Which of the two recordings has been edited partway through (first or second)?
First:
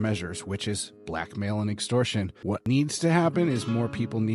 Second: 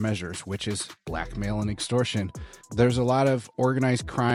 first